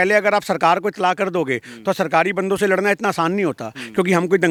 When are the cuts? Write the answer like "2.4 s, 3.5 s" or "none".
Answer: none